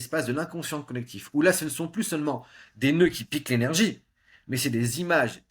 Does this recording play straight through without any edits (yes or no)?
yes